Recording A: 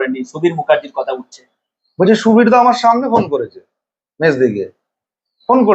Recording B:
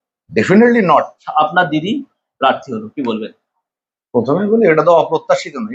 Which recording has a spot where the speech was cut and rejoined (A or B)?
B